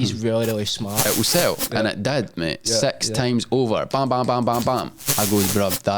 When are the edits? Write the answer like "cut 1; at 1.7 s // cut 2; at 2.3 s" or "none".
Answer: cut 1; at 1.0 s // cut 2; at 5.1 s

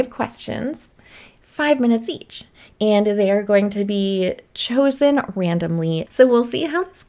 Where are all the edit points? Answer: cut 1; at 6.0 s

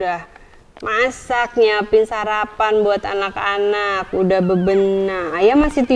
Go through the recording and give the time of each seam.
none

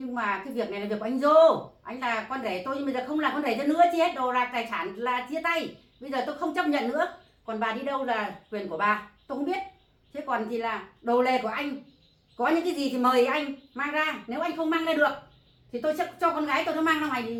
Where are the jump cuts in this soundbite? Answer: none

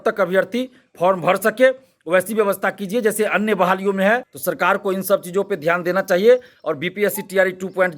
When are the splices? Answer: cut 1; at 4.3 s

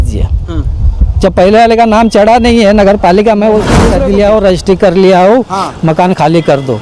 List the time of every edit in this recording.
cut 1; at 3.9 s

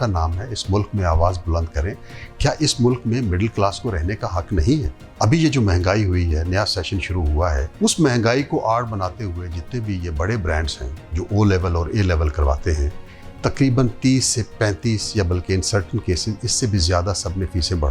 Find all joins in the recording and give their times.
cut 1; at 5.0 s // cut 2; at 7.7 s

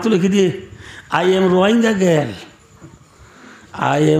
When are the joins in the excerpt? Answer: none

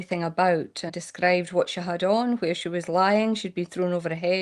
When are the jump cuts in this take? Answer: cut 1; at 0.9 s

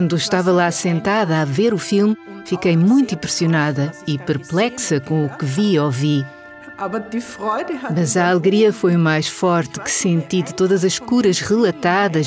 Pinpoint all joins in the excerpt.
cut 1; at 4.7 s

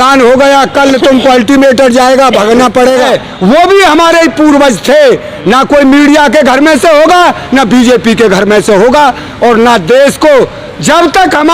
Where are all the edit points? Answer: cut 1; at 3.1 s

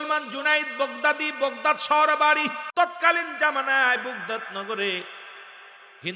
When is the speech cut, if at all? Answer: cut 1; at 2.6 s

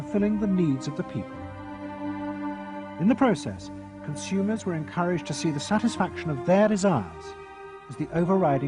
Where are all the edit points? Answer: cut 1; at 1.2 s

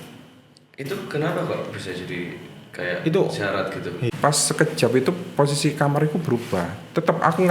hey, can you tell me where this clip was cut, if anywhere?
cut 1; at 4.0 s

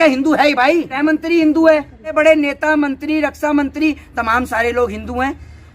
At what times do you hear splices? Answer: cut 1; at 0.9 s // cut 2; at 2.2 s

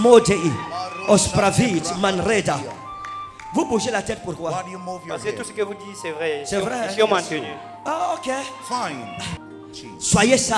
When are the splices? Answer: cut 1; at 9.4 s

